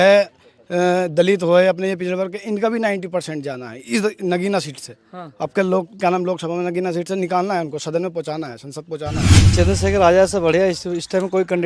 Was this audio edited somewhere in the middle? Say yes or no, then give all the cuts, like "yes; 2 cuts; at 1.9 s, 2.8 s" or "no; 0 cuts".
yes; 1 cut; at 9.4 s